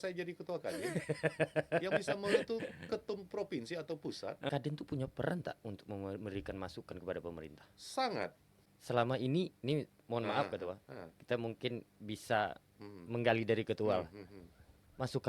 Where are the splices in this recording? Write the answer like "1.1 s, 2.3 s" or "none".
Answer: 4.5 s